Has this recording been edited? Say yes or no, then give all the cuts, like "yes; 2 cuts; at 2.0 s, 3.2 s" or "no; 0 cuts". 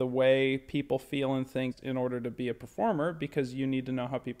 yes; 1 cut; at 1.8 s